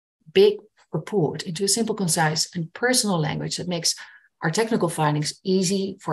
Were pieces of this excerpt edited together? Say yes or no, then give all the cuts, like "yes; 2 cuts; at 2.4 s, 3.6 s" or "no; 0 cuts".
no; 0 cuts